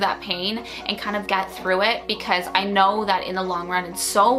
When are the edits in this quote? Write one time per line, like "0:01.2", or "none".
none